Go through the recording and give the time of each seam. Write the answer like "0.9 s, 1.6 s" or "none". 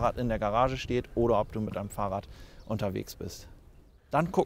none